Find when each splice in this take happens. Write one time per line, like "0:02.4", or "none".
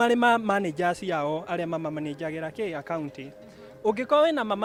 none